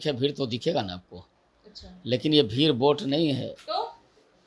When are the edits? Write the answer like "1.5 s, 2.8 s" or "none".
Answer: none